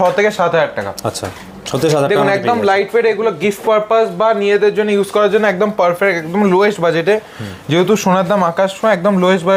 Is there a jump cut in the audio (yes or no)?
no